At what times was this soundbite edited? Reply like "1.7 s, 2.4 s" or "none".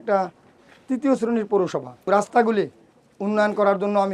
1.9 s

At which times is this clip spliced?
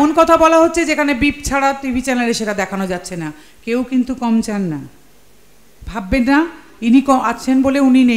none

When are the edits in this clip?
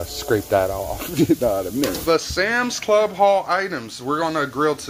1.3 s, 2.0 s

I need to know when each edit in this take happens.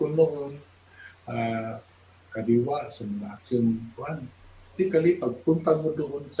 4.7 s

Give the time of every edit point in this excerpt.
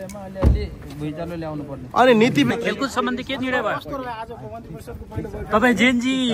2.5 s

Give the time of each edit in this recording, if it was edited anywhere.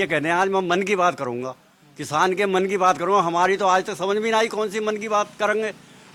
none

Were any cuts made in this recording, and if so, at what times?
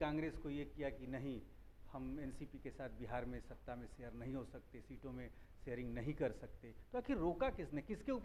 none

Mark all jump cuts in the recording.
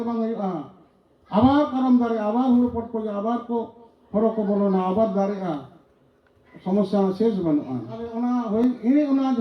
8.2 s

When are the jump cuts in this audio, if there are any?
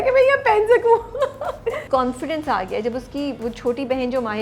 1.8 s, 3.4 s

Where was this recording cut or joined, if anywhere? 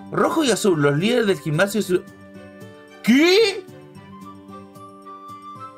none

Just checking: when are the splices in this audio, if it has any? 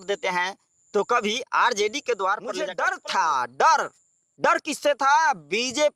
2.7 s

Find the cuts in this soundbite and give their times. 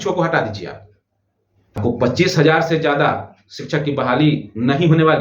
1.8 s

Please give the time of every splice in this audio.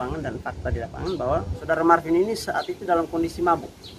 1.6 s

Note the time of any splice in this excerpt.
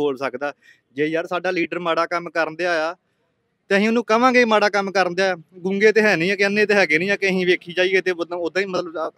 none

